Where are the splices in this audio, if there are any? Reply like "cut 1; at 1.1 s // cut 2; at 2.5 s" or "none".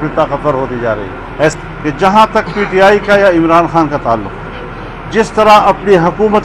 cut 1; at 1.5 s